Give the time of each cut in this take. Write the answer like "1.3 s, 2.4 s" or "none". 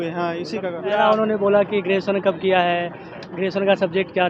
1.0 s